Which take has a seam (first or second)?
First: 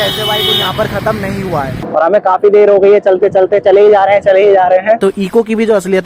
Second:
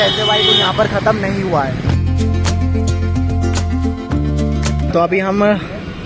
first